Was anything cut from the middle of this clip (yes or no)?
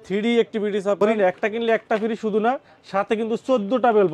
yes